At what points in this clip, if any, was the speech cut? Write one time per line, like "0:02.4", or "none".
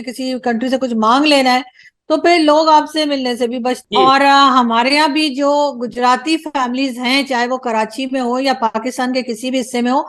0:03.8

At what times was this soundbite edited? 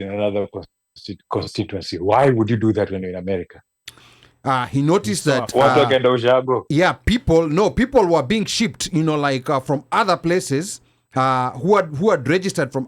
0:04.0

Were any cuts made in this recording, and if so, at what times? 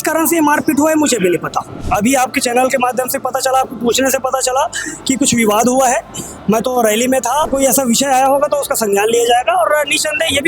0:01.8
0:07.5

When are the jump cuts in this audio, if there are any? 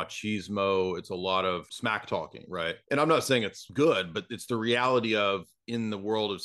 0:01.7
0:02.8
0:03.6

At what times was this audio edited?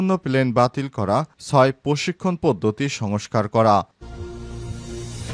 0:03.9

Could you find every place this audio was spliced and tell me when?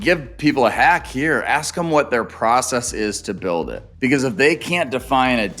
0:03.8

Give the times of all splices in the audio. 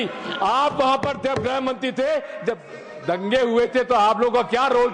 none

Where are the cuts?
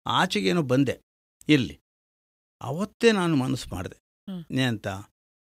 none

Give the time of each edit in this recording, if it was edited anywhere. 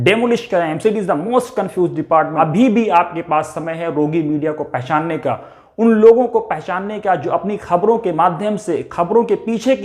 0:02.3

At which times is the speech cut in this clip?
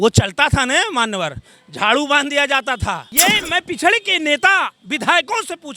0:03.0

